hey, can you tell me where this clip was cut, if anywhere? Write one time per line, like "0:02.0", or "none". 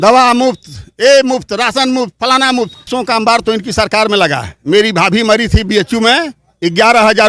0:02.9